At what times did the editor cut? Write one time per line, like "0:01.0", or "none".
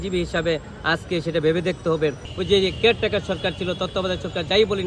0:02.3